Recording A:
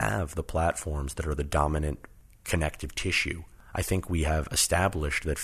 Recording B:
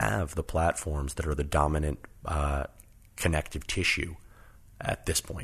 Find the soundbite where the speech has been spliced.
A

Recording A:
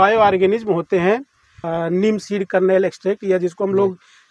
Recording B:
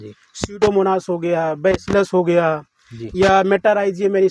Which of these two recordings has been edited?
A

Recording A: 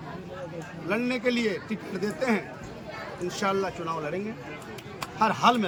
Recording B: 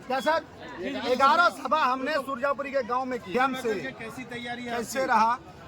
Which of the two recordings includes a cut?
B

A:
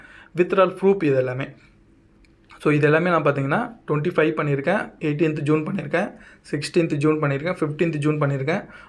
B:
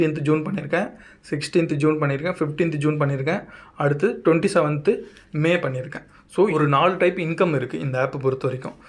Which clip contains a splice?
B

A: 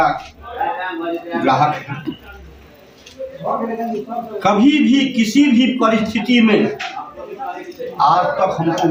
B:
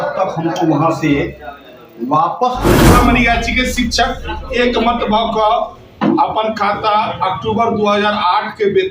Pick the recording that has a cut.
B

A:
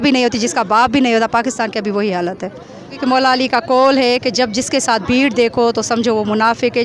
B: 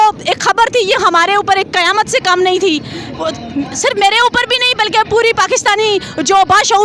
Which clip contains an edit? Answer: A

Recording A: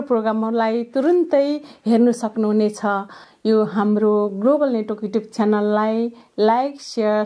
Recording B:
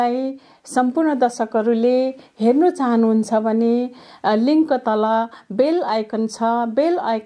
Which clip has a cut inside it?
A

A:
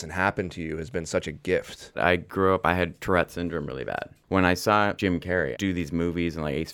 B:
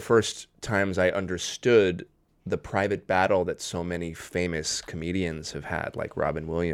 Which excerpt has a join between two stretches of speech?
A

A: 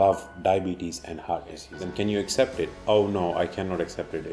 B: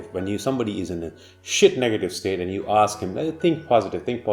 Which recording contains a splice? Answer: A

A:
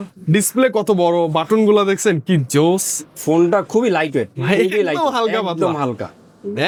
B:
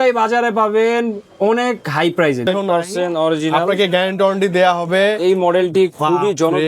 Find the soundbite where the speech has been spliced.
B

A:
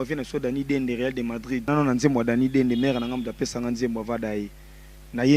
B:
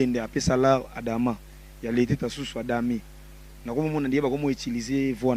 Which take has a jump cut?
A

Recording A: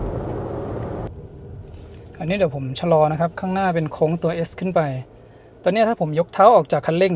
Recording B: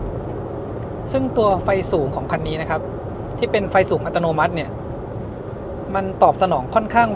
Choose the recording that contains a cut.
A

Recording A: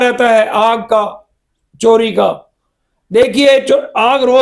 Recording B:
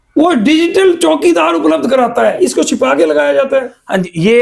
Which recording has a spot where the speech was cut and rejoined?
B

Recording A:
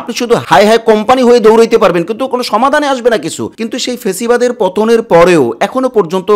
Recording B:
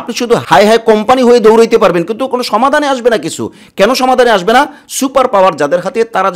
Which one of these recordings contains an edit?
A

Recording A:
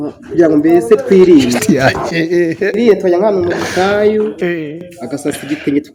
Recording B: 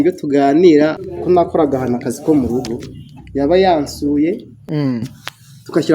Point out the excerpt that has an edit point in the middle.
B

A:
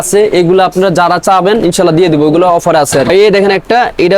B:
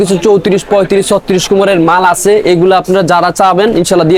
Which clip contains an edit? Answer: A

